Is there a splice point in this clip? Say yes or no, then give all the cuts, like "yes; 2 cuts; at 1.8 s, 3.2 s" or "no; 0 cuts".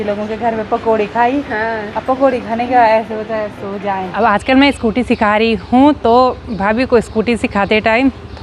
yes; 1 cut; at 4.1 s